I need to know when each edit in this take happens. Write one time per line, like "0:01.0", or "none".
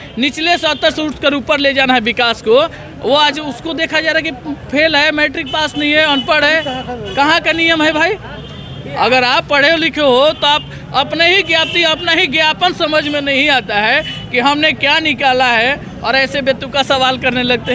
none